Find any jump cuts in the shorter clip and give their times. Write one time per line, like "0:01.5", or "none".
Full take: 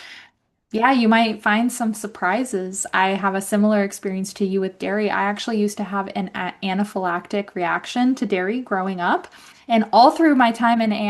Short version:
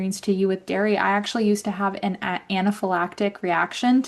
none